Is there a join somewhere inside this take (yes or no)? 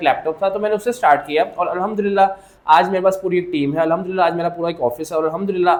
no